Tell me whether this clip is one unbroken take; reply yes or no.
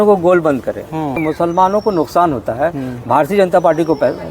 no